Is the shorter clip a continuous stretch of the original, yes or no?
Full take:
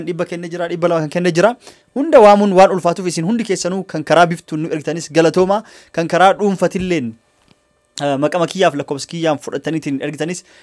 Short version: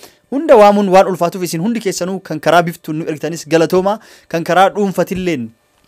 yes